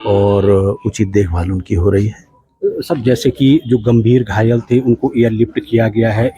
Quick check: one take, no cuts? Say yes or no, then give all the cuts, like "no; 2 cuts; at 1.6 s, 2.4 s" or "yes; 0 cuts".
yes; 0 cuts